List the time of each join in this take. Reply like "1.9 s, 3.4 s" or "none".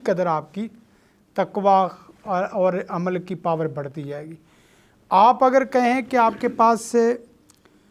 none